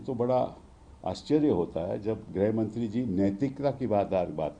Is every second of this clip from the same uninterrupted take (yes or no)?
yes